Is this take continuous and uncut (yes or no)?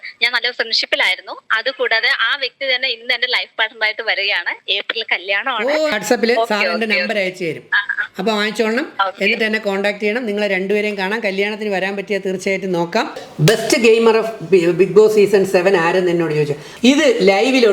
no